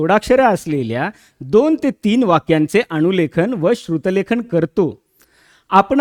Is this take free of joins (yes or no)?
yes